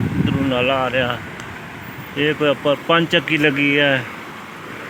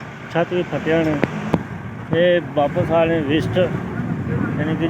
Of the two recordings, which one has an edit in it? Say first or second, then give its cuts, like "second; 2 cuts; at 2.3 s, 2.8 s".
second; 1 cut; at 1.5 s